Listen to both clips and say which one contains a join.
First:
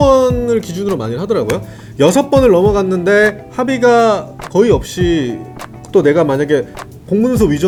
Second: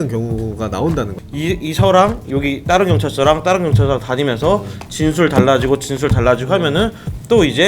second; 1 cut; at 1.2 s

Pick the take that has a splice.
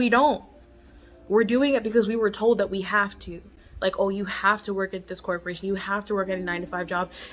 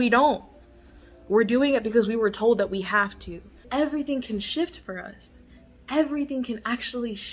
second; 1 cut; at 3.6 s

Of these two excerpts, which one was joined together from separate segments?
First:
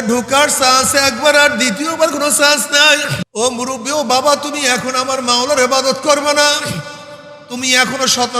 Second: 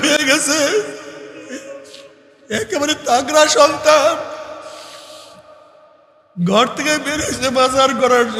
first; 1 cut; at 3.2 s

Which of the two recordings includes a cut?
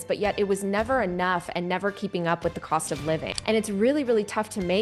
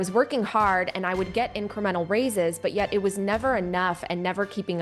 first; 1 cut; at 3.3 s

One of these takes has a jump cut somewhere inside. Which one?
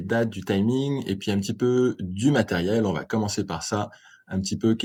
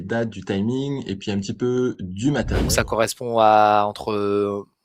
second; 1 cut; at 2.6 s

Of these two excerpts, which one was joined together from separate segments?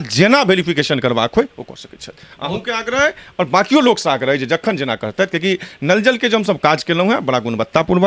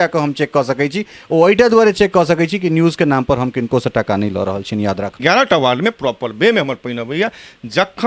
second; 1 cut; at 5.2 s

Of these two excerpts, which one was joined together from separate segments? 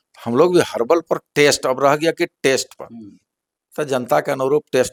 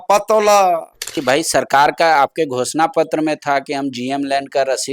second; 1 cut; at 1.1 s

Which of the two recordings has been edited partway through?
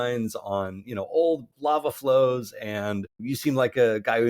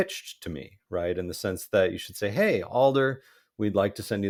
first; 2 cuts; at 1.5 s, 3.2 s

